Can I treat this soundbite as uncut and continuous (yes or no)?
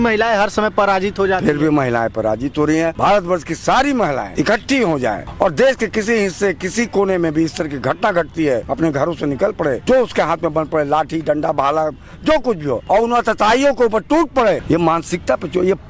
no